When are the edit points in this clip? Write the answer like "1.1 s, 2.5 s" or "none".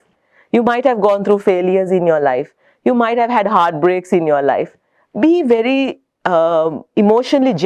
none